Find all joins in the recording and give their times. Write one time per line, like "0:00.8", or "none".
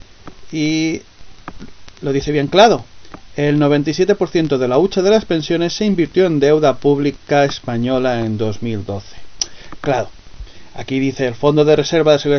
0:04.0